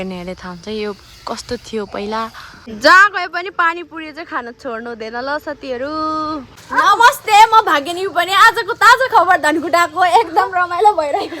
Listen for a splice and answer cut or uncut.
cut